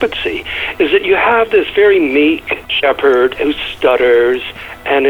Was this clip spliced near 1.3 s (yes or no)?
no